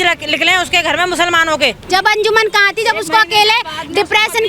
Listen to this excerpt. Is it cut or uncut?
cut